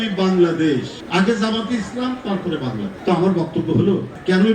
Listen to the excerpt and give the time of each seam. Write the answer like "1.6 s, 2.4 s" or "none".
1.0 s, 2.9 s